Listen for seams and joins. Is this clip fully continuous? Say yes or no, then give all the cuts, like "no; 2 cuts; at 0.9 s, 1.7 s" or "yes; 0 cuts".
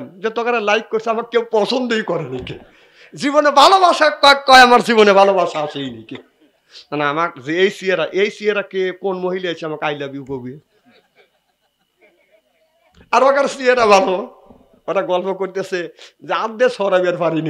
yes; 0 cuts